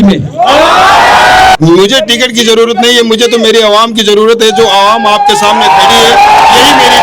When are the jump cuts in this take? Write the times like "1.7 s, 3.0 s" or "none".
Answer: 1.6 s